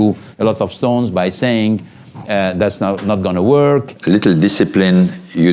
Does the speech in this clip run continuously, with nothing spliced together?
no; 1 cut; at 3.9 s

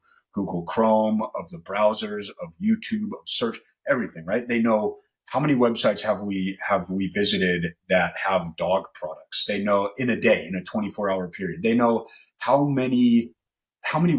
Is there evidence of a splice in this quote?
no; 0 cuts

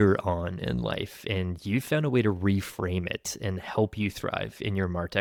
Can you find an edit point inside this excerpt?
no; 0 cuts

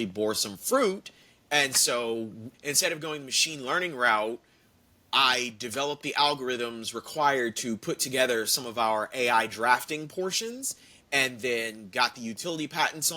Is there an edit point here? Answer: yes; 1 cut; at 2.4 s

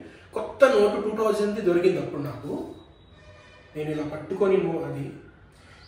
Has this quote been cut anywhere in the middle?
no; 0 cuts

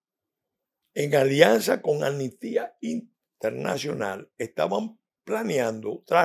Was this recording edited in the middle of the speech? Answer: no; 0 cuts

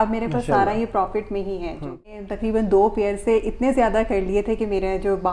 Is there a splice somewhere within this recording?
yes; 1 cut; at 2.1 s

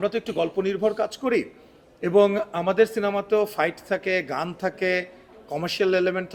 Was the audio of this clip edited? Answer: no; 0 cuts

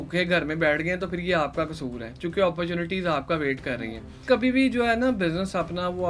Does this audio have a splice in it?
yes; 1 cut; at 4.2 s

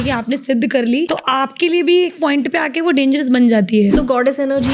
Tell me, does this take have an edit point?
yes; 2 cuts; at 1.1 s, 4.0 s

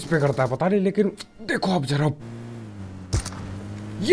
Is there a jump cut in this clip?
yes; 1 cut; at 2.8 s

